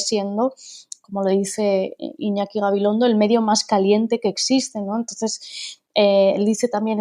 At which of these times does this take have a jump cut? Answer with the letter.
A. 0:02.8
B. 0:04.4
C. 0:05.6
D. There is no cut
D